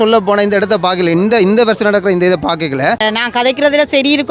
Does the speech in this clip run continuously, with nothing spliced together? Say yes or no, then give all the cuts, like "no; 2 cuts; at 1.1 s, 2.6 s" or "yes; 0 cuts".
no; 1 cut; at 3.0 s